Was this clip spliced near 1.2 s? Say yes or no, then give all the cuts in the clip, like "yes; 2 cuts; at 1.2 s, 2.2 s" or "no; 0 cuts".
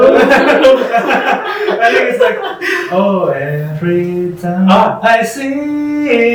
no; 0 cuts